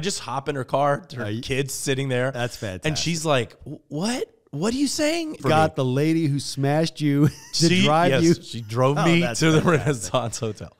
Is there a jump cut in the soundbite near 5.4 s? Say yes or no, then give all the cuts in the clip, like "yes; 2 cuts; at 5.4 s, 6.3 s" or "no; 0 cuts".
yes; 1 cut; at 5.4 s